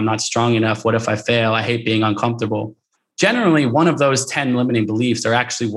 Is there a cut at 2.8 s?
no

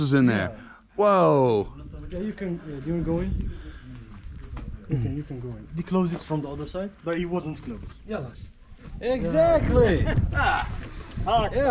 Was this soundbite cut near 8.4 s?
yes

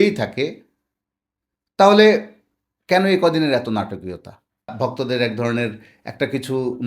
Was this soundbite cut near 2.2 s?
no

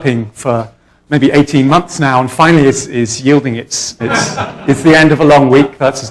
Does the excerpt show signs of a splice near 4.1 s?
no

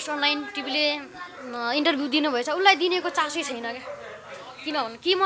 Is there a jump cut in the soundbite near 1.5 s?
no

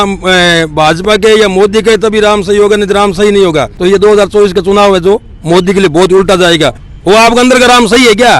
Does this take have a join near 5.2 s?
no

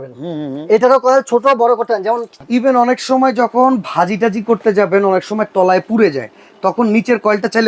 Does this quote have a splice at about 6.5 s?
no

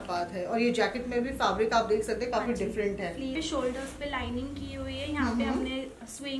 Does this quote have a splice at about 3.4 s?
yes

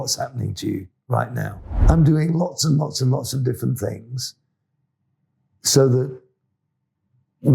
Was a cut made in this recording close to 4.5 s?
no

